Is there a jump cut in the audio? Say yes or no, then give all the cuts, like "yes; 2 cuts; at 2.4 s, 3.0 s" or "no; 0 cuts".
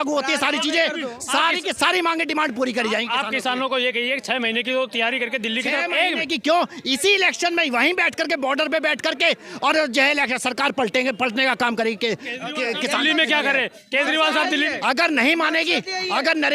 no; 0 cuts